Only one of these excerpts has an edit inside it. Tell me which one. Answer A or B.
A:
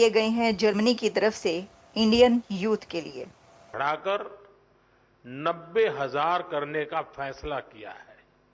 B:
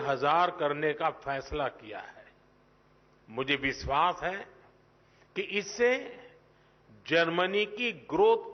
A